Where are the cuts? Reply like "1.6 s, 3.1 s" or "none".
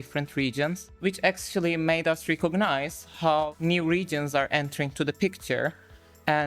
3.5 s